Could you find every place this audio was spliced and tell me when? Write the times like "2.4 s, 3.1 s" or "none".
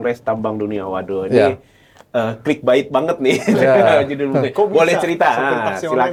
none